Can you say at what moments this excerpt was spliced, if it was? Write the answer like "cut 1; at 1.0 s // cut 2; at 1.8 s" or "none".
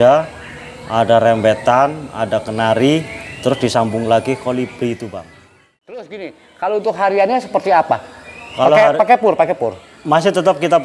cut 1; at 6.1 s